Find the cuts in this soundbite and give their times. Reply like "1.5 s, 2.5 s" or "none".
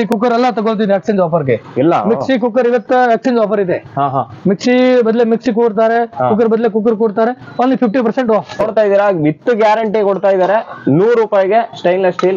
8.6 s